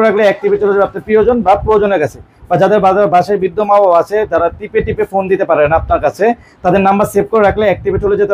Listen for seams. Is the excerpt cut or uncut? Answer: uncut